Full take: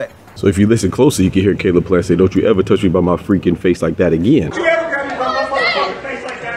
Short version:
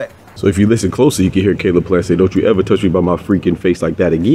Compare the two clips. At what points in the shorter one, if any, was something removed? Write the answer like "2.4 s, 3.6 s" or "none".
none

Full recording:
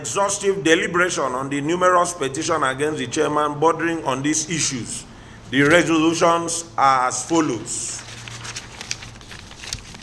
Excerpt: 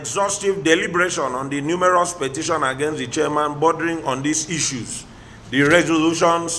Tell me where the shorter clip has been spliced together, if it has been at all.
none

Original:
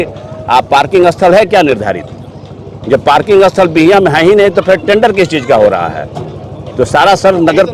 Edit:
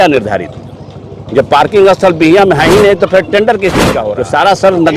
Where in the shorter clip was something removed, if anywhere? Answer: 3.9 s

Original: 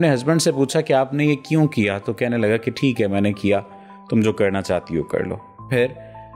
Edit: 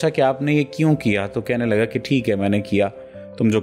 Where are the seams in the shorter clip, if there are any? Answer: none

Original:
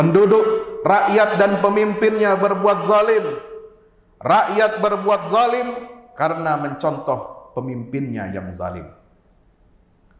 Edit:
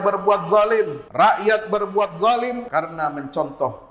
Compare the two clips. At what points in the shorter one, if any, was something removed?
1.0 s, 2.6 s

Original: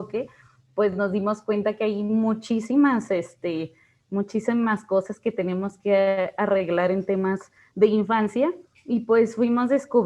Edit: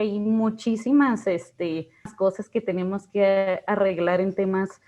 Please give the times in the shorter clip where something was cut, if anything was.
2.1 s

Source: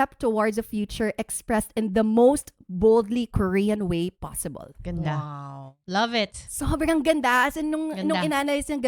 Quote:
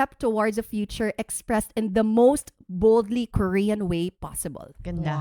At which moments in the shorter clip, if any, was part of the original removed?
none

